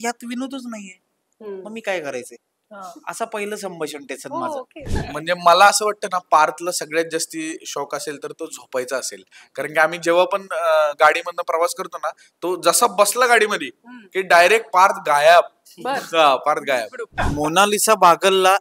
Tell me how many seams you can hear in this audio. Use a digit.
2